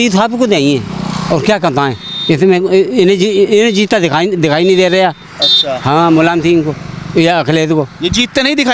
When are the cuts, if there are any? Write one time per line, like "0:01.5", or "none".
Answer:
none